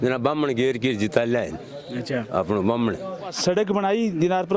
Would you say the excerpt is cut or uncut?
cut